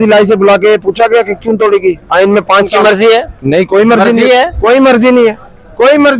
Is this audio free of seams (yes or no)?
yes